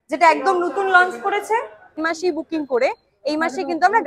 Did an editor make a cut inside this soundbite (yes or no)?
yes